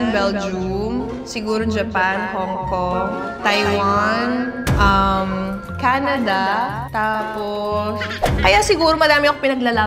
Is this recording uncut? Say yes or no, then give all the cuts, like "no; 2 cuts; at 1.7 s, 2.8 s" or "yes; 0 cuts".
no; 1 cut; at 8.2 s